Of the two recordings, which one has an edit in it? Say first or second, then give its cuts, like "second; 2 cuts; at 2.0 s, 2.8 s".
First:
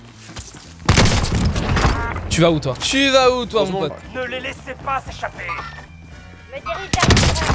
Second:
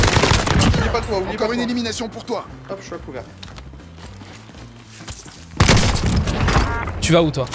first; 1 cut; at 3.9 s